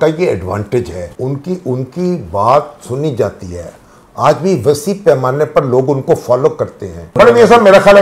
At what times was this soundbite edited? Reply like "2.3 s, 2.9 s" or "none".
1.0 s, 7.1 s